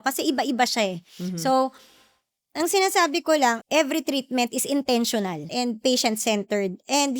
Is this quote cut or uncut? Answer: cut